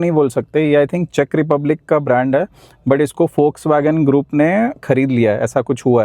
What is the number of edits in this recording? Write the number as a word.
zero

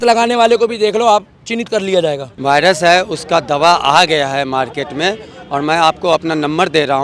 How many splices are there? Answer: one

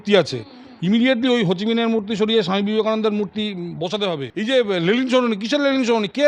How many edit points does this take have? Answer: one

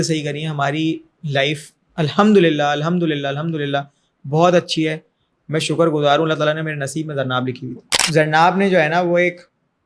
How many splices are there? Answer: one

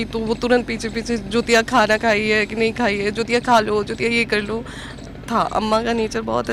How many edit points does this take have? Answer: zero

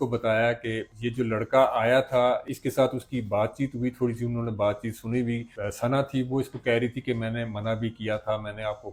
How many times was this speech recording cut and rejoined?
zero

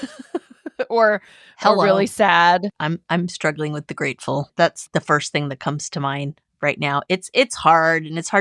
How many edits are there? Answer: one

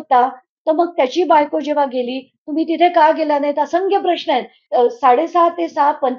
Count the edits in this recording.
one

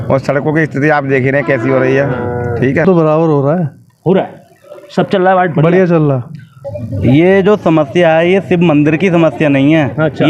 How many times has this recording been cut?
two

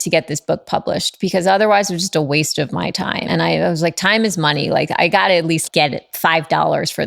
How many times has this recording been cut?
two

